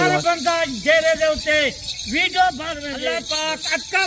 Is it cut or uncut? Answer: cut